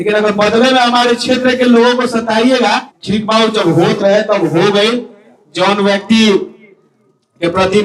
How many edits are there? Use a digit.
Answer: 1